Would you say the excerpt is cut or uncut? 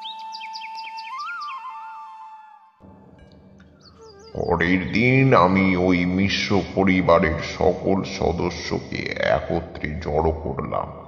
uncut